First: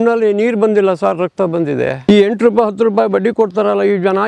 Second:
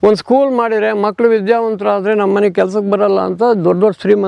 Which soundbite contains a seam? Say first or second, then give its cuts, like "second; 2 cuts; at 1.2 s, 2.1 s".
first; 1 cut; at 2.0 s